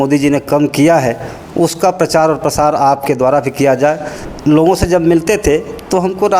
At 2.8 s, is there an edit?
no; 1 cut; at 4.1 s

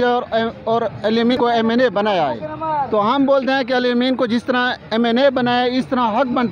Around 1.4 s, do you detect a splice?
yes; 1 cut; at 1.4 s

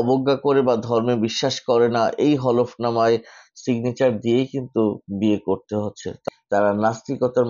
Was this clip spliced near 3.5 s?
no; 1 cut; at 6.2 s

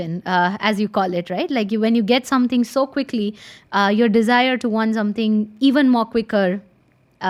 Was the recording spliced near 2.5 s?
no; 0 cuts

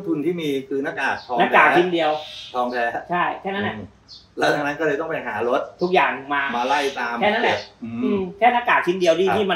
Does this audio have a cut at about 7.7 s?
no; 0 cuts

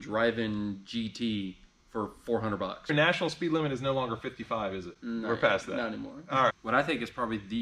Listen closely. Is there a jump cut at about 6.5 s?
yes; 2 cuts; at 2.9 s, 6.5 s

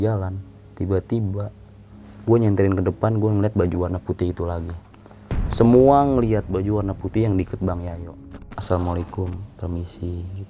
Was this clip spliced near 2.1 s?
no; 1 cut; at 8.5 s

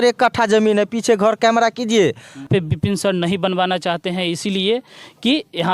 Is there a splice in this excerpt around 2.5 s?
yes; 1 cut; at 2.5 s

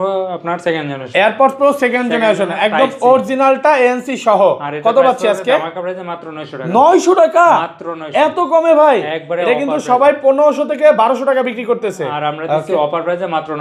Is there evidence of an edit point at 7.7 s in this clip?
no; 0 cuts

